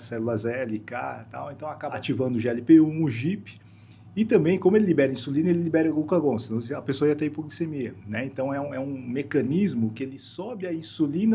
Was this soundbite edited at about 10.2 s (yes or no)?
no